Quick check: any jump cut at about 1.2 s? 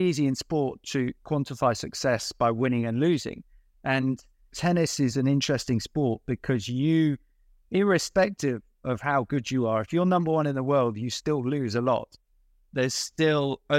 yes; 2 cuts; at 1.2 s, 4.6 s

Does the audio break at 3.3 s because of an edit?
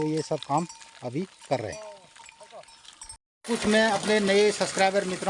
yes; 1 cut; at 3.3 s

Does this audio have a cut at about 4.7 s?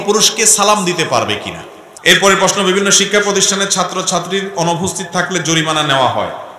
no; 1 cut; at 2.2 s

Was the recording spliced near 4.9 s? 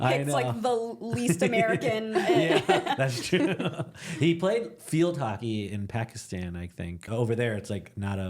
no; 2 cuts; at 2.8 s, 7.1 s

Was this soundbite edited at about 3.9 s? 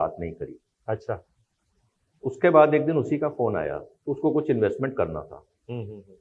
yes; 1 cut; at 3.9 s

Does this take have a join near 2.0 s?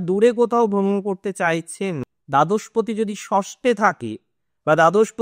yes; 1 cut; at 2.0 s

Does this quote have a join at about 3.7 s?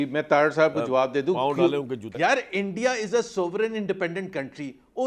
no; 1 cut; at 2.0 s

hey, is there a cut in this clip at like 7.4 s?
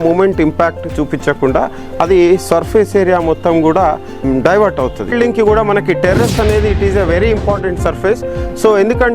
no; 2 cuts; at 4.2 s, 5.1 s

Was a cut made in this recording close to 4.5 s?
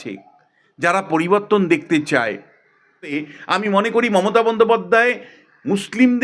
no; 1 cut; at 3.1 s

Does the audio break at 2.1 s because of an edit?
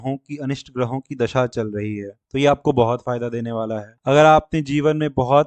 yes; 2 cuts; at 2.1 s, 3.9 s

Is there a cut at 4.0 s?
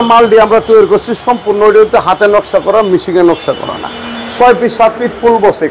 no; 0 cuts

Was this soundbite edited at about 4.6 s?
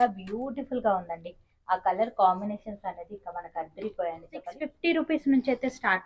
yes; 1 cut; at 4.6 s

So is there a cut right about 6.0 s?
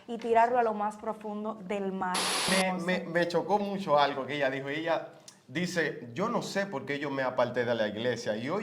no; 1 cut; at 2.5 s

